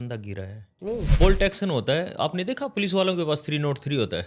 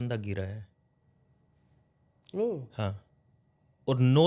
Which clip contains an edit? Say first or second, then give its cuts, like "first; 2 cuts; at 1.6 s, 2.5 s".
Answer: first; 1 cut; at 1.1 s